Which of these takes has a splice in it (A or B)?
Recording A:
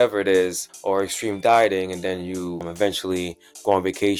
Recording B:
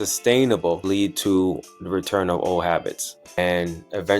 B